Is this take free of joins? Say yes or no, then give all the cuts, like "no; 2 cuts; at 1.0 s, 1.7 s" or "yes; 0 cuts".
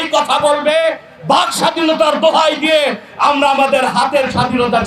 yes; 0 cuts